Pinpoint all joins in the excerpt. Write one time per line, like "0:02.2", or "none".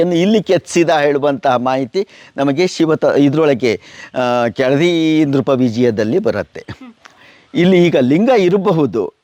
none